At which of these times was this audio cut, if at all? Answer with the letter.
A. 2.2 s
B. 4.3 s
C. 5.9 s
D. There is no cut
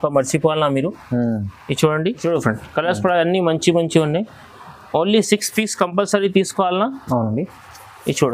A